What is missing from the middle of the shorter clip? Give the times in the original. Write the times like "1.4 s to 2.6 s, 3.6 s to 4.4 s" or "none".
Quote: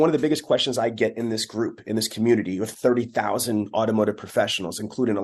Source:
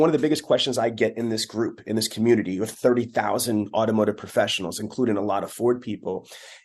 none

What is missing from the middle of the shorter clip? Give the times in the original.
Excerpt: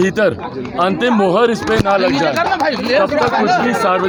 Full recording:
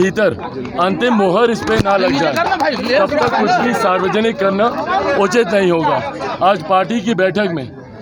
none

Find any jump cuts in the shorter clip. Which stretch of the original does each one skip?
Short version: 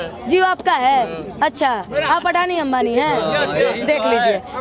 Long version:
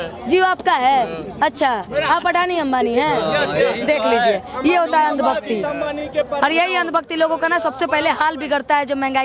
none

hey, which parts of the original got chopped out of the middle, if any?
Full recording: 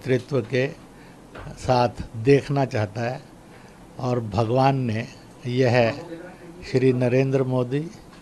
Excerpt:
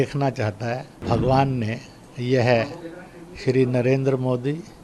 3.4 s to 4.3 s

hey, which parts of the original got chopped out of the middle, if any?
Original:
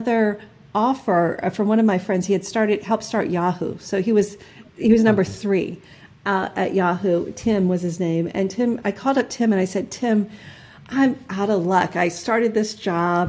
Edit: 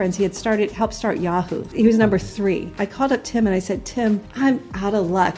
3.7 s to 4.7 s, 5.9 s to 8.9 s, 10.3 s to 10.8 s

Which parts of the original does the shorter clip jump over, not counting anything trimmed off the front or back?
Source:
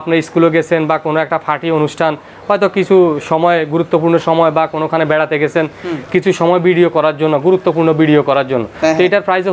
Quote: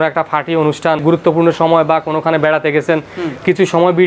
2.2 s to 3.7 s

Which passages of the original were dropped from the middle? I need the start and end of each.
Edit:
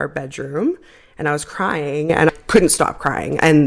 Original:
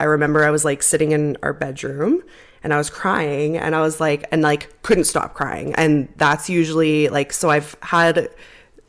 3.8 s to 4.7 s

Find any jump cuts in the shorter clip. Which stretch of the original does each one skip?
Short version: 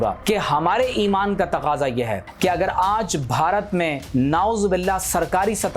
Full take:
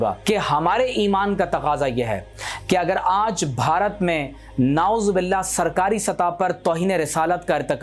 2.2 s to 2.5 s, 4.3 s to 4.5 s

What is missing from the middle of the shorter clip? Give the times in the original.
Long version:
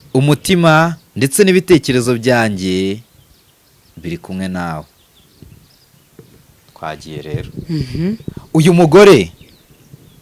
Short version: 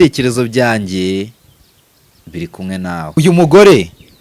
4.9 s to 8.6 s

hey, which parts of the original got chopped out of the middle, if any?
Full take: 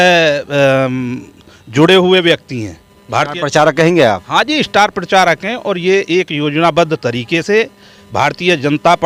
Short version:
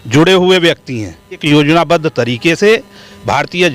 3.0 s to 6.3 s

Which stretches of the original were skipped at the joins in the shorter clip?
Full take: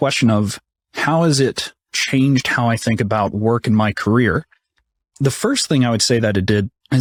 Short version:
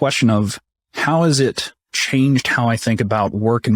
none

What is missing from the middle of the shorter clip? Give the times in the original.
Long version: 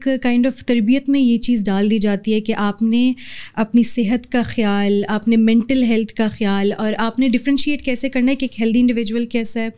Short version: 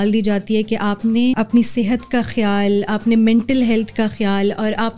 3.1 s to 3.6 s

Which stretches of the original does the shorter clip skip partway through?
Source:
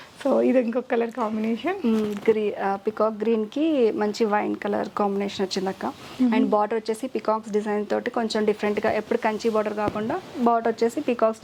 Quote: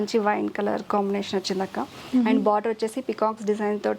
none

